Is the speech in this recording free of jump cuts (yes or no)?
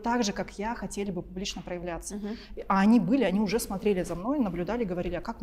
yes